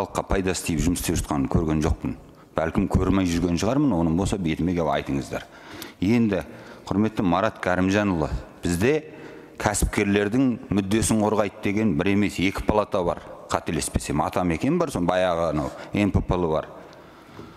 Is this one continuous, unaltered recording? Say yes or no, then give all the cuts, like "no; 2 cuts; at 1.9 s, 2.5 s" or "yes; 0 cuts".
yes; 0 cuts